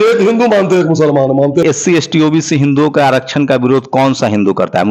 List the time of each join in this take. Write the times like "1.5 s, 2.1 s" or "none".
1.6 s